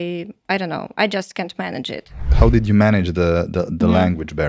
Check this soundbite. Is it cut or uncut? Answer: cut